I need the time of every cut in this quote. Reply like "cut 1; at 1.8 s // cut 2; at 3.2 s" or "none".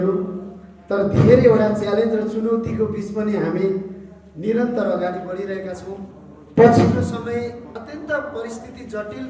cut 1; at 7.8 s